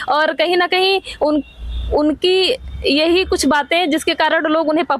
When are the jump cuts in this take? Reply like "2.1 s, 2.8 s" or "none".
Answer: none